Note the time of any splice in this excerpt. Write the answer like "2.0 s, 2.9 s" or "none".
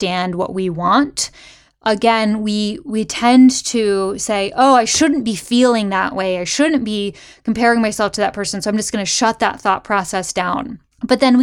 none